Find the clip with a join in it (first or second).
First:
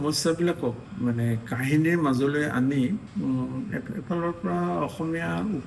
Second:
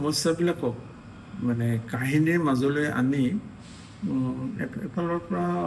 first